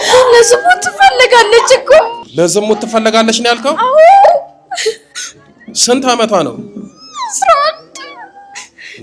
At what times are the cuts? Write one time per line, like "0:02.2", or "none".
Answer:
0:02.2